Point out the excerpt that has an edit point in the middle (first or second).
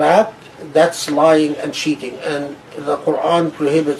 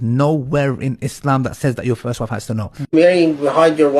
second